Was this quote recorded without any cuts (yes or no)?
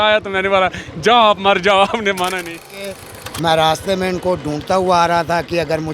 no